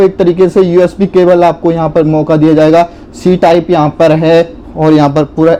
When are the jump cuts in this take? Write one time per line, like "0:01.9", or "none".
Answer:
none